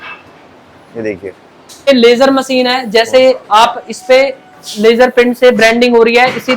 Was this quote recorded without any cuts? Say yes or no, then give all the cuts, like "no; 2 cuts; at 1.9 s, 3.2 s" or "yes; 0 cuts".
no; 1 cut; at 1.9 s